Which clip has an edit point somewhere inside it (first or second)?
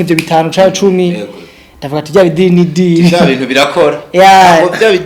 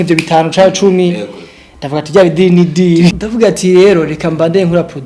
second